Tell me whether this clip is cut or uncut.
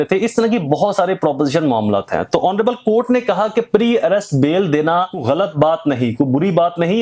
cut